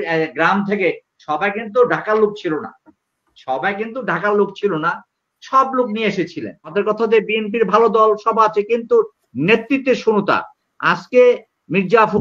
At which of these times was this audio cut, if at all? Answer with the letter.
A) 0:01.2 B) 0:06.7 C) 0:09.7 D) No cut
B